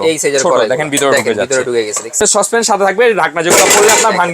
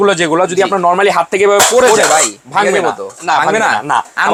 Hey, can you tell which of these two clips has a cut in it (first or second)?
first